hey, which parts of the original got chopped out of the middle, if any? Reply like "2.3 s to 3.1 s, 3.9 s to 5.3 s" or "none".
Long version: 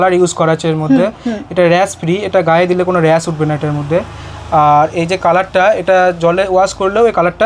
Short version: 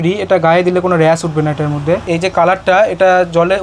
4.1 s to 5.0 s

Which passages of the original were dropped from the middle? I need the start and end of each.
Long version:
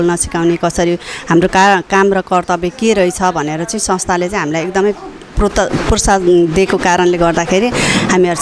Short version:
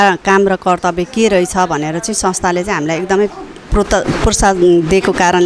none

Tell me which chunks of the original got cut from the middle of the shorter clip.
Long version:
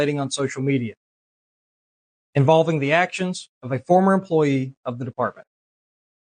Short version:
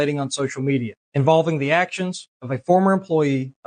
1.0 s to 2.2 s

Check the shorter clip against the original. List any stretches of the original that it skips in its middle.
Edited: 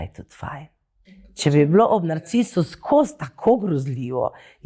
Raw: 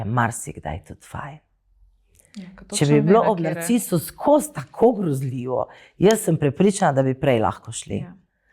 2.1 s to 2.8 s

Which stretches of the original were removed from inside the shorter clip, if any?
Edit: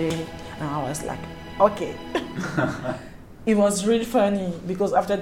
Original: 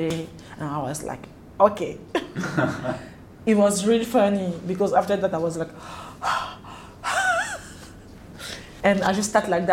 none

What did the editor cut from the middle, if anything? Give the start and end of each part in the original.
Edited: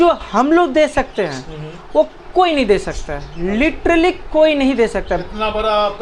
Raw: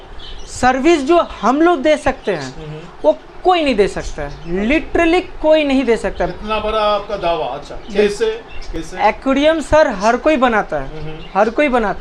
none

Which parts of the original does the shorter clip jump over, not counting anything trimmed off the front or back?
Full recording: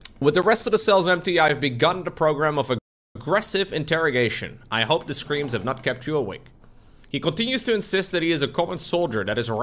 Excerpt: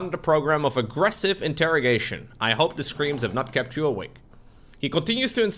2.8 s to 3.2 s

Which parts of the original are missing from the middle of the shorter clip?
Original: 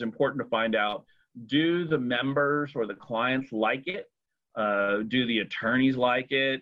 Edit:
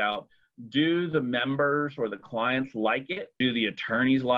4.1 s to 5.1 s

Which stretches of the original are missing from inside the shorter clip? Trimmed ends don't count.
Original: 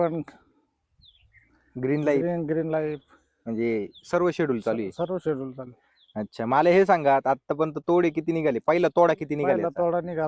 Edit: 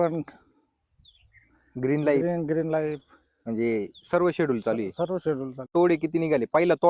5.6 s to 7.8 s

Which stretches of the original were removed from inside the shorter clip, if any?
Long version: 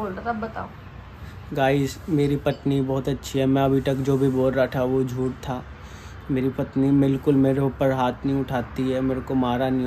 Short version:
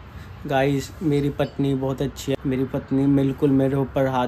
3.4 s to 6.2 s

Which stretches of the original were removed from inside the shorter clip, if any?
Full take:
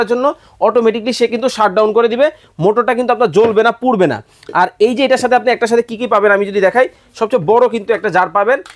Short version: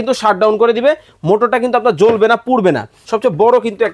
4.3 s to 7.1 s

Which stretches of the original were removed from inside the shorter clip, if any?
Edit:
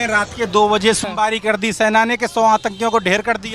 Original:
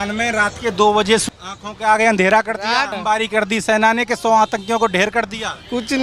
1.3 s to 3.0 s

